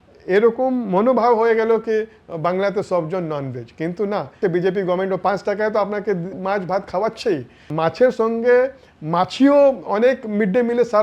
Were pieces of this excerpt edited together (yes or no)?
yes